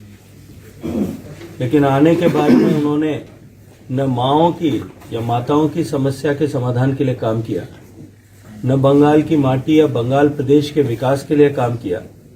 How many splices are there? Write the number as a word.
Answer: one